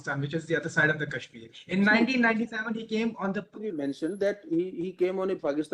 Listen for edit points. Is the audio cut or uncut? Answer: cut